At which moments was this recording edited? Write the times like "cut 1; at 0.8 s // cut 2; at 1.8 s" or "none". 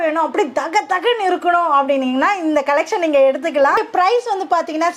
cut 1; at 3.8 s